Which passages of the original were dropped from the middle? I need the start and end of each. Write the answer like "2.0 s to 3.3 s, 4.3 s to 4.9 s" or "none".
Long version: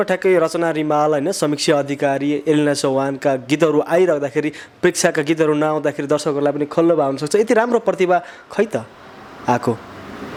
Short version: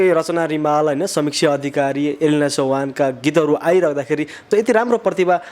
4.6 s to 7.2 s